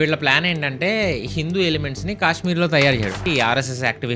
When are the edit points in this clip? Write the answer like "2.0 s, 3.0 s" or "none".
3.3 s